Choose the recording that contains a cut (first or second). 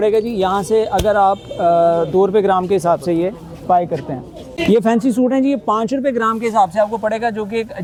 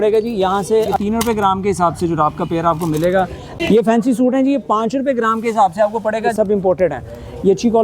second